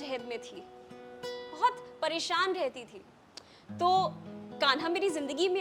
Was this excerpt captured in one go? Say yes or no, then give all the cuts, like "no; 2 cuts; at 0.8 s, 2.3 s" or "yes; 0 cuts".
yes; 0 cuts